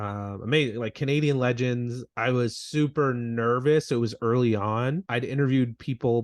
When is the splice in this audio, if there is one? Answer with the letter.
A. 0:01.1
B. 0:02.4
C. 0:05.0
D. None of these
C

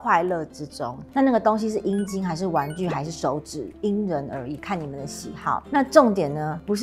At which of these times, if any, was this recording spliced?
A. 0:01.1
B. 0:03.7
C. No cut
A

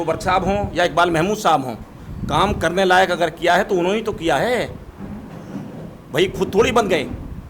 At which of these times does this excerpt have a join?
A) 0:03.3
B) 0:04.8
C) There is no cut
C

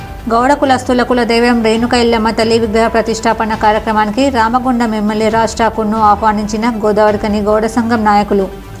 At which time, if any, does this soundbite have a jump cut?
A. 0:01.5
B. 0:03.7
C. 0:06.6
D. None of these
D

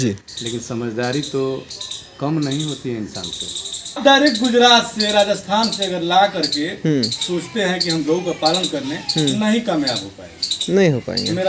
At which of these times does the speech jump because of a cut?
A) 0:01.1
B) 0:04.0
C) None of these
B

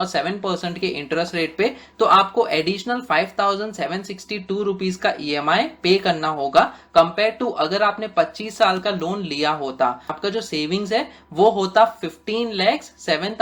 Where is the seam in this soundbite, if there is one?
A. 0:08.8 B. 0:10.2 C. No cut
B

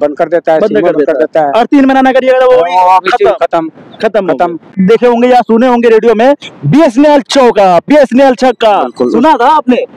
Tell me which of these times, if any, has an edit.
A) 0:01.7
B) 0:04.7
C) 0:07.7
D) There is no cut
B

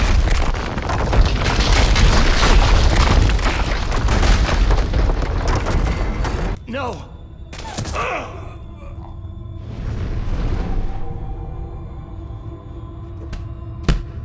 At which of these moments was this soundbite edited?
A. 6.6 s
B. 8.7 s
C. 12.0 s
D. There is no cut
A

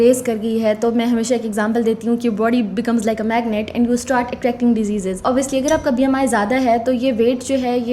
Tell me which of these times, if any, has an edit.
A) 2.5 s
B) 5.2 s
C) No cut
B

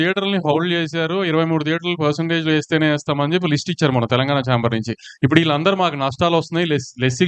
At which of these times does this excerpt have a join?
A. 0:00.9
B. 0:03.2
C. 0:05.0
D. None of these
C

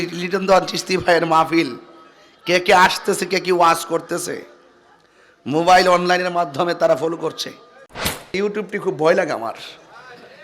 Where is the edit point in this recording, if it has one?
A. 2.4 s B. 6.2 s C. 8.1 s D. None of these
C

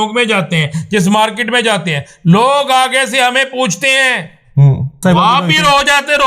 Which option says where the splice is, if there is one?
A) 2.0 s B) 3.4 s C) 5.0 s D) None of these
C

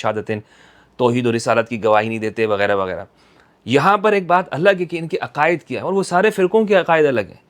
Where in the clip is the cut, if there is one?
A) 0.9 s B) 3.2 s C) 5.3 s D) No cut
D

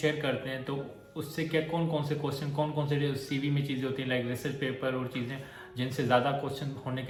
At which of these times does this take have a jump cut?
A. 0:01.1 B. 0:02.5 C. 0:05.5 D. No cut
D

